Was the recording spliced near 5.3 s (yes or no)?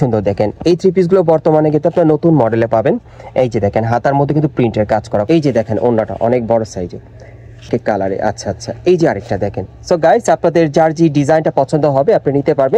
yes